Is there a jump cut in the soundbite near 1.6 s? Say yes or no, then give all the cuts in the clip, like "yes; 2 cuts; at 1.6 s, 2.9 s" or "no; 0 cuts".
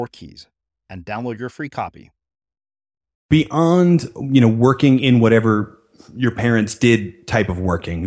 no; 1 cut; at 3.3 s